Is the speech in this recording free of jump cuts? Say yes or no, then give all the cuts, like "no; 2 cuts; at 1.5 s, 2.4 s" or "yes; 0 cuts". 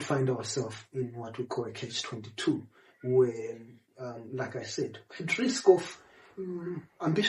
yes; 0 cuts